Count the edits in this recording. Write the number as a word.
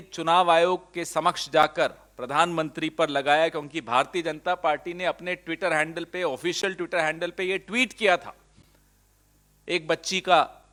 zero